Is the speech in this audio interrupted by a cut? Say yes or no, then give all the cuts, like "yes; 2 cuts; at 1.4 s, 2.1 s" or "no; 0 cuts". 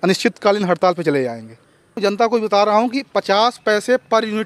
yes; 1 cut; at 2.0 s